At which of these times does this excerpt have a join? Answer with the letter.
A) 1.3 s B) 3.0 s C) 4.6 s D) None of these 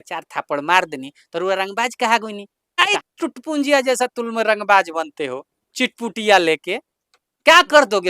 B